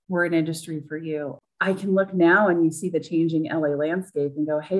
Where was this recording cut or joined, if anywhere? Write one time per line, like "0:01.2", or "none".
0:01.4